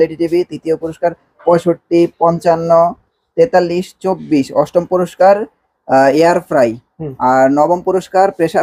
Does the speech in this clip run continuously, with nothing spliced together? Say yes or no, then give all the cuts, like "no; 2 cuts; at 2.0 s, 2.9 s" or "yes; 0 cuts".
yes; 0 cuts